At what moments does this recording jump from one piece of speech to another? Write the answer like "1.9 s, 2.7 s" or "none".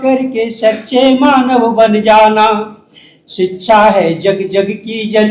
none